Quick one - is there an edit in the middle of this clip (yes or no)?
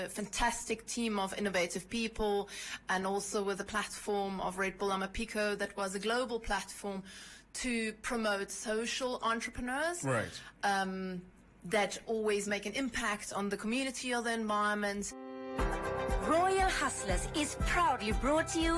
yes